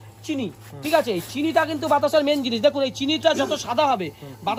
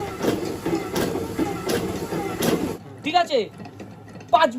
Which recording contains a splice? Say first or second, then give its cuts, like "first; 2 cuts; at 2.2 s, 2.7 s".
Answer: second; 1 cut; at 2.7 s